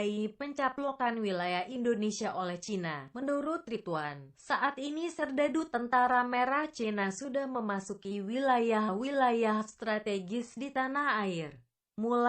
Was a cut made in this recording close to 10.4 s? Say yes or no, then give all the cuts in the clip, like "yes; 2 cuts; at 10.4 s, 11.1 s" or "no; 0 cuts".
no; 1 cut; at 7.0 s